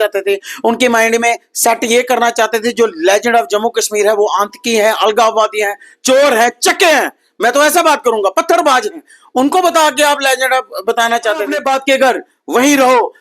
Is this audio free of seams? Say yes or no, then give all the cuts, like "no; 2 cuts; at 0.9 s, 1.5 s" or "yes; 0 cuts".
no; 1 cut; at 11.6 s